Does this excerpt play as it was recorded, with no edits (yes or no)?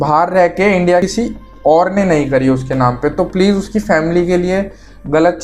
no